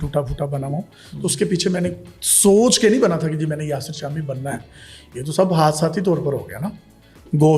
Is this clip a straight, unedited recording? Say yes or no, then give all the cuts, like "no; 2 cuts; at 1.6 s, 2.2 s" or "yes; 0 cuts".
yes; 0 cuts